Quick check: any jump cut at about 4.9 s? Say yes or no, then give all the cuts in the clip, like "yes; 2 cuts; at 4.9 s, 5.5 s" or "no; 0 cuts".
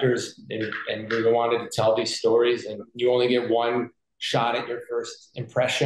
no; 1 cut; at 2.9 s